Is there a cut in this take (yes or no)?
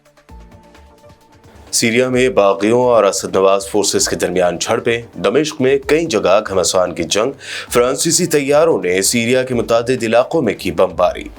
yes